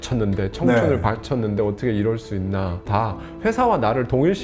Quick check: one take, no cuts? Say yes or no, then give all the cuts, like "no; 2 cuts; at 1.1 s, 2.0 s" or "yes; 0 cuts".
no; 1 cut; at 2.9 s